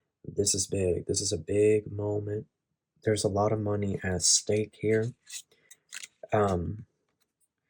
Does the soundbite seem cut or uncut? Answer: uncut